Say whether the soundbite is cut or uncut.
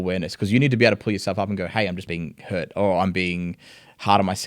cut